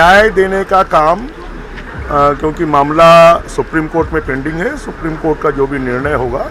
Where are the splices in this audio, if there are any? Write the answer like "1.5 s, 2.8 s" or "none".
none